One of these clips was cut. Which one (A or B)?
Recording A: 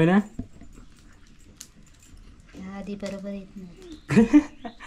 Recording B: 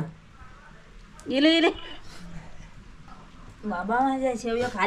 B